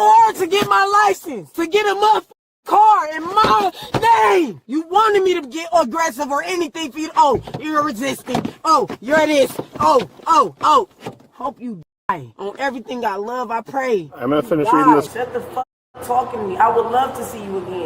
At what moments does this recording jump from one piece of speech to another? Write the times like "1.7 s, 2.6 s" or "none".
15.1 s